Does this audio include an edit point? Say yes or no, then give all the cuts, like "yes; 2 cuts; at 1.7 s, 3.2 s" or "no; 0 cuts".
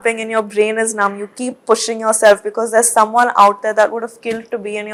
no; 0 cuts